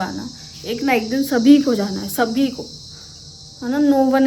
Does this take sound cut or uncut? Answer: uncut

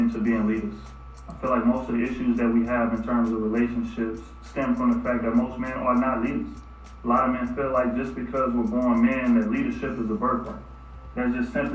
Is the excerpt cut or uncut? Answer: cut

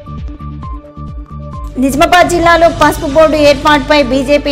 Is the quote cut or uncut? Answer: uncut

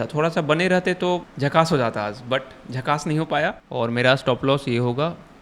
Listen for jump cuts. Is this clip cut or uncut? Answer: cut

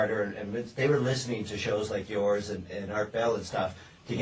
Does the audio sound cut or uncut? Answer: uncut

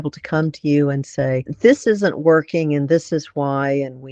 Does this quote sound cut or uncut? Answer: cut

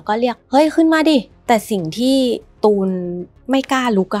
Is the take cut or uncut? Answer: cut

